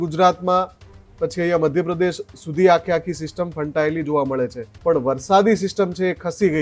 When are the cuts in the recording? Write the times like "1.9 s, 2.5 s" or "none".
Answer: 4.6 s